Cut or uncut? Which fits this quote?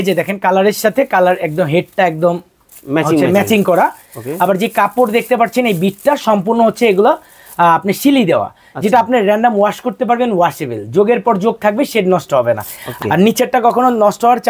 cut